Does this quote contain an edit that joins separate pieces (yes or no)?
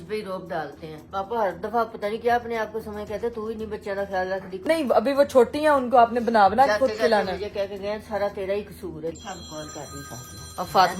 yes